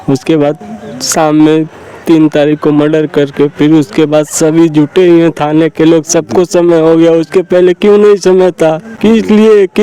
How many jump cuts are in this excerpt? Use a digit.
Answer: 0